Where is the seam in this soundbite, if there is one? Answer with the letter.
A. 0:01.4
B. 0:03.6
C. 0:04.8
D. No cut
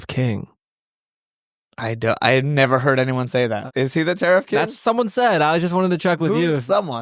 B